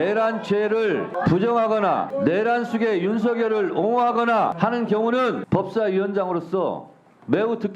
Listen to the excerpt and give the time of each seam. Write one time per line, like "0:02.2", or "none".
0:01.1
0:02.1
0:04.5
0:05.4